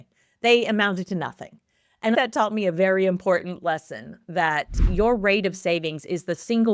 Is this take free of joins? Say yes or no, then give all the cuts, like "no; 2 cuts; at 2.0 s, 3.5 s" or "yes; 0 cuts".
no; 2 cuts; at 2.2 s, 4.9 s